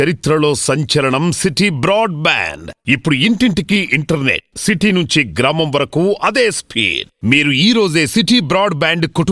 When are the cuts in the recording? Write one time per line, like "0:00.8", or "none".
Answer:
none